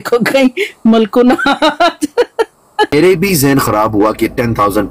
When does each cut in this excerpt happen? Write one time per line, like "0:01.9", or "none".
0:02.9